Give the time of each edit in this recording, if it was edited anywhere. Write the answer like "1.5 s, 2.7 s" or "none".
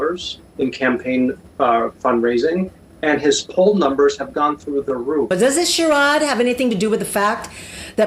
5.3 s